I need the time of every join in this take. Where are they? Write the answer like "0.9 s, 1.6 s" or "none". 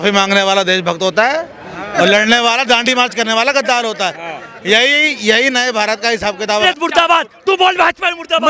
6.5 s